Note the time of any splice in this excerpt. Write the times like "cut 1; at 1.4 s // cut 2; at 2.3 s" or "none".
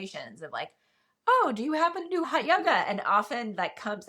cut 1; at 2.2 s